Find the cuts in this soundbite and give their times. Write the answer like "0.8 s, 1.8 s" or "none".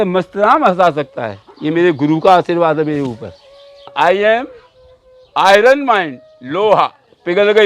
3.9 s

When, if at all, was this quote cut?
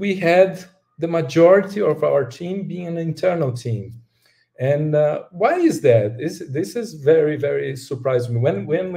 none

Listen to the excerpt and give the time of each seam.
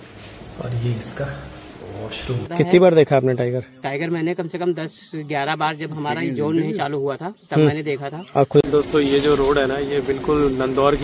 2.5 s, 8.6 s

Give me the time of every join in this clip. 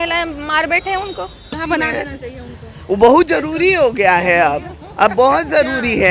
1.6 s

